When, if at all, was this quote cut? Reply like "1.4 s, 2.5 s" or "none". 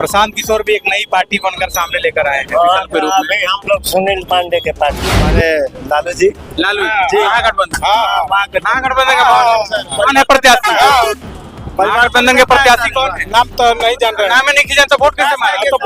5.3 s